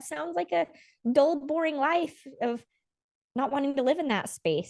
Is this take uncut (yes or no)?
yes